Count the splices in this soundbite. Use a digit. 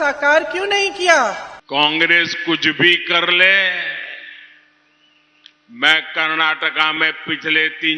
1